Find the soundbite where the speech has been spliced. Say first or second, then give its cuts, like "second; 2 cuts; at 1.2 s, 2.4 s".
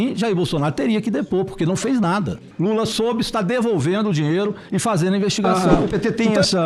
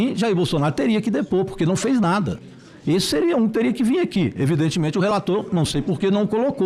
first; 2 cuts; at 2.4 s, 5.5 s